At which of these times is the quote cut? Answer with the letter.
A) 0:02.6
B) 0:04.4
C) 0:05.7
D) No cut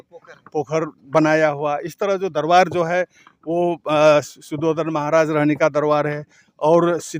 D